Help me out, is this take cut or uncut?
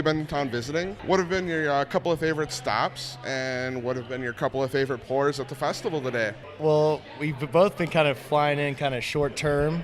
cut